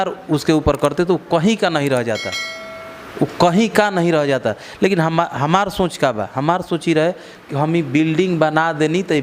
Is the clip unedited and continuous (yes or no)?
yes